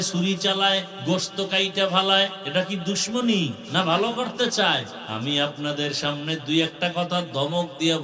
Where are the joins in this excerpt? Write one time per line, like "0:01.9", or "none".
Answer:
0:00.9
0:02.4
0:03.6
0:05.0

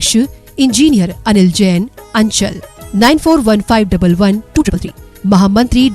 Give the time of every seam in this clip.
0:04.6

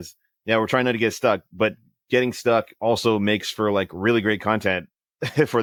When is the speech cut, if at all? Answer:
none

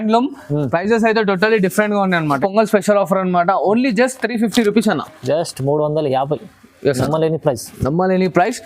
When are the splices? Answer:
0:02.4

